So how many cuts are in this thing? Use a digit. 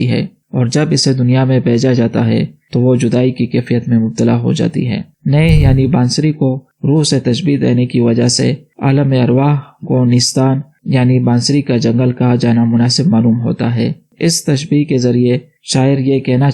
1